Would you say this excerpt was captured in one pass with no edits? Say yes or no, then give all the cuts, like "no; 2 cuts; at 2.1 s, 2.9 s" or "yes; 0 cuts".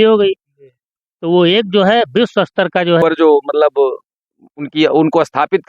no; 1 cut; at 3.0 s